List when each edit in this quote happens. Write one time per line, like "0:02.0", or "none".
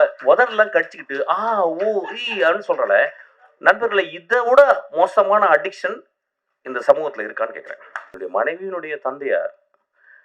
0:08.0

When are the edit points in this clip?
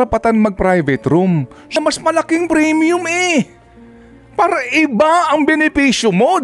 0:01.7

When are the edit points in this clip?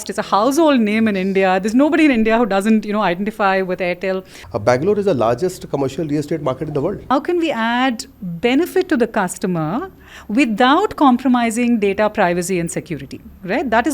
0:04.4
0:07.1

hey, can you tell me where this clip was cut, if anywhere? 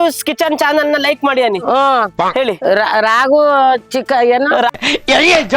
none

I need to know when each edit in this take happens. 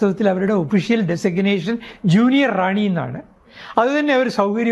none

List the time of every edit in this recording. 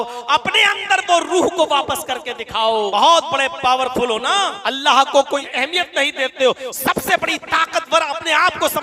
0:02.9
0:04.6
0:05.5

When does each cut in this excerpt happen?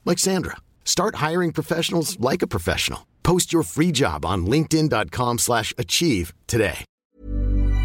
0:06.9

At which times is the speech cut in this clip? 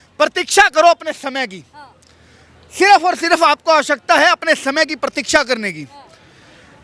none

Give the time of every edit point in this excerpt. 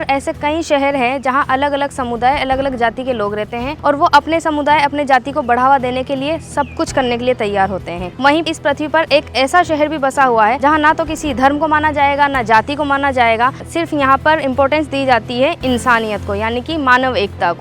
0:03.7
0:08.4
0:10.6
0:13.6

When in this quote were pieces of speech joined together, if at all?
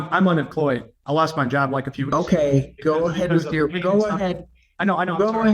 0:00.9

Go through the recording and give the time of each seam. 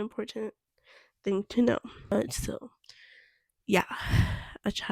0:02.2

